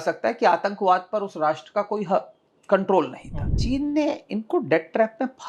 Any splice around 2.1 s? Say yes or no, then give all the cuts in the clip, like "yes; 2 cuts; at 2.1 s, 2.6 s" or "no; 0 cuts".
no; 1 cut; at 3.6 s